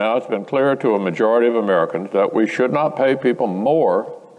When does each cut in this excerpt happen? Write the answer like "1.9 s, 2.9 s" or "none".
none

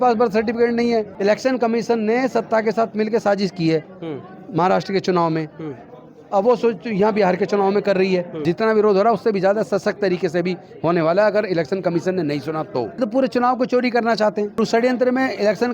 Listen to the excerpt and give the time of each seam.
1.1 s, 8.3 s, 13.0 s, 14.6 s

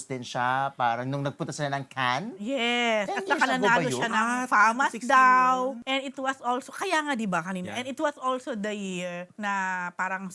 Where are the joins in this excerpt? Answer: 5.8 s, 9.3 s

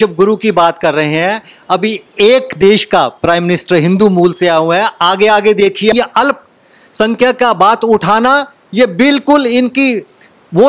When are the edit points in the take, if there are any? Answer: 5.9 s

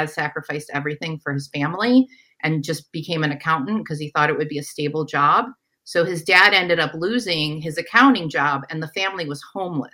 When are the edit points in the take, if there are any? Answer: none

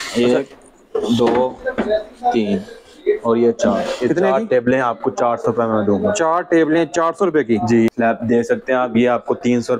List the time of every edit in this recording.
7.9 s

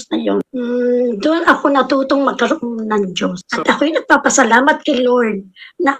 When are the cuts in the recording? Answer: 3.4 s

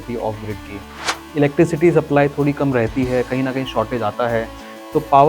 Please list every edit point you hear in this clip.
1.2 s

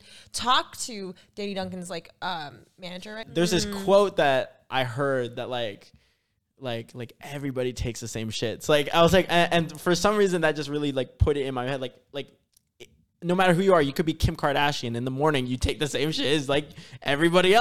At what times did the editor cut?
3.2 s

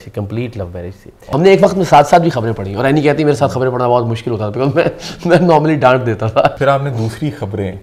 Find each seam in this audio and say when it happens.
1.2 s, 6.6 s

